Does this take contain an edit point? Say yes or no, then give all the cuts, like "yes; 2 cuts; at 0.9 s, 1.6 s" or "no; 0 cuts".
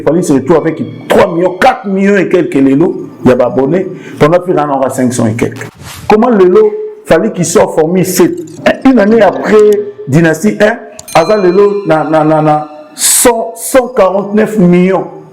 yes; 2 cuts; at 5.9 s, 8.5 s